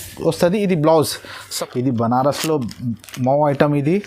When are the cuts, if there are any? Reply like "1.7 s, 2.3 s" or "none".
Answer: 1.5 s